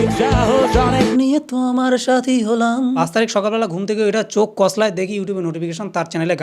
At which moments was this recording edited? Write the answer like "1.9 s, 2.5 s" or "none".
1.1 s, 3.0 s